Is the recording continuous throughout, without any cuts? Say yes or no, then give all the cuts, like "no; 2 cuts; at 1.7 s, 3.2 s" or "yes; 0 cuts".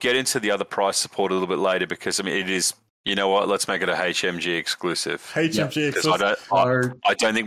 no; 1 cut; at 2.8 s